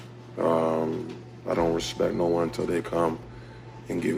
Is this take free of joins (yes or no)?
yes